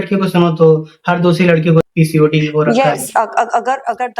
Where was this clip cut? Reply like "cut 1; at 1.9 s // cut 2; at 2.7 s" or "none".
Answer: cut 1; at 1.8 s